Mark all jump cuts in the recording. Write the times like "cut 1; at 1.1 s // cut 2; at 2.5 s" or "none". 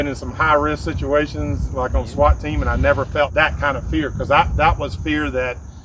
cut 1; at 3.3 s

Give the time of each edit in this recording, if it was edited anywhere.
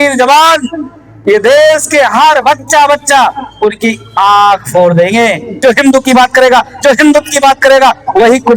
cut 1; at 5.5 s

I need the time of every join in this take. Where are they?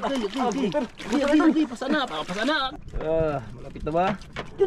cut 1; at 2.7 s

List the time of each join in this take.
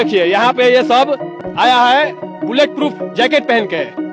cut 1; at 1.4 s

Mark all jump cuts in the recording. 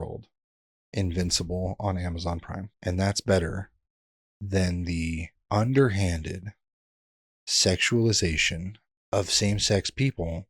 cut 1; at 2.7 s // cut 2; at 5.3 s

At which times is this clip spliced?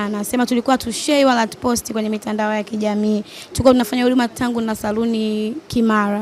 none

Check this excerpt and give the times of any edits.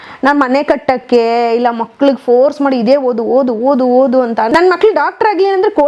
cut 1; at 4.5 s

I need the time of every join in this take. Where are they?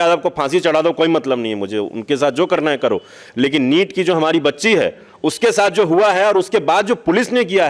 none

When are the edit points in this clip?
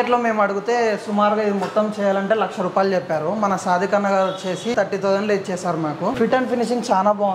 cut 1; at 4.7 s // cut 2; at 6.1 s

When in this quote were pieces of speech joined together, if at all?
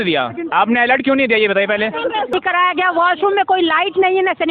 cut 1; at 2.3 s

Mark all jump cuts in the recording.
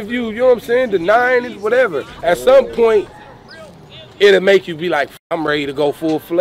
cut 1; at 5.3 s

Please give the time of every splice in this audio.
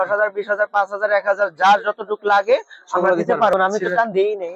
cut 1; at 3.6 s

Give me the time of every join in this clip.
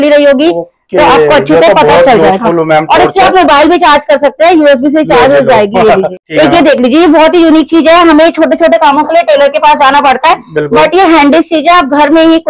cut 1; at 6.2 s

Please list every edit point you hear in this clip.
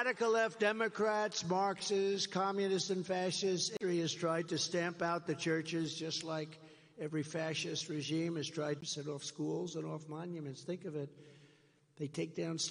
none

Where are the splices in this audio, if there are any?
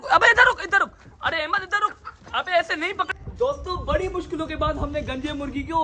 cut 1; at 3.2 s

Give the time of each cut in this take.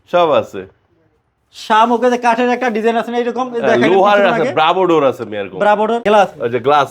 cut 1; at 6.0 s

